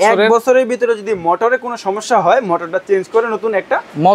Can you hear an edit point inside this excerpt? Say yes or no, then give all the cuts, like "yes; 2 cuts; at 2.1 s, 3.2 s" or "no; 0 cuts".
no; 0 cuts